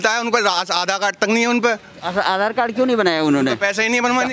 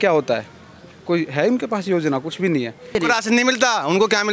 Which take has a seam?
second; 1 cut; at 3.0 s

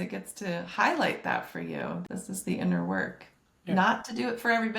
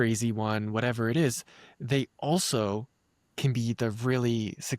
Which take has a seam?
first; 1 cut; at 2.0 s

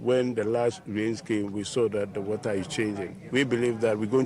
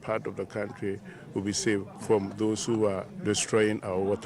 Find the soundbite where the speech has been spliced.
second; 2 cuts; at 1.9 s, 3.1 s

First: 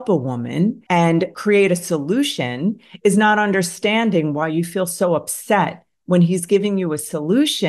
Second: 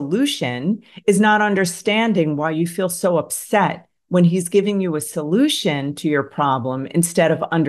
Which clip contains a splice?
first; 1 cut; at 1.0 s

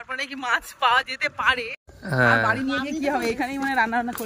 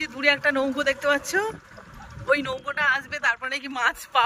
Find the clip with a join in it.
first; 1 cut; at 1.9 s

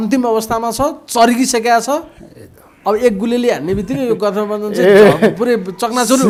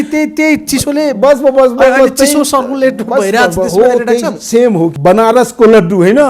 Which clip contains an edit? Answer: second; 1 cut; at 4.9 s

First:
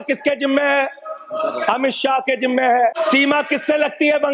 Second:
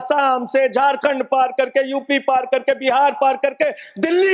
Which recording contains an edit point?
first; 1 cut; at 3.0 s

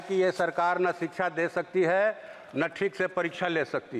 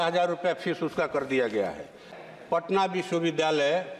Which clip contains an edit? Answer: second; 1 cut; at 2.2 s

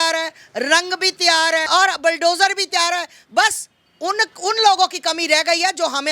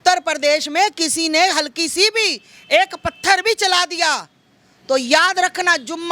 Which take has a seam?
first; 1 cut; at 1.6 s

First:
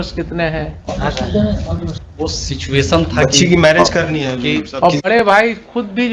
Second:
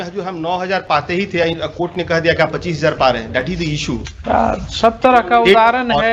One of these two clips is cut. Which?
first; 1 cut; at 1.9 s

